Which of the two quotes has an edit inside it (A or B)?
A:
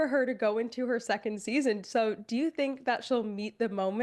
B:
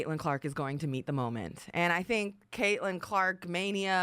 B